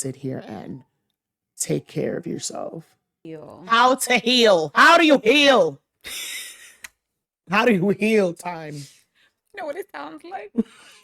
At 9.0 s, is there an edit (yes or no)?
no